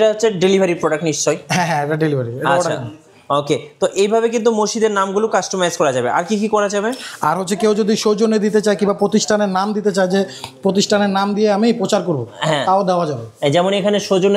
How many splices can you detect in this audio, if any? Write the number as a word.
zero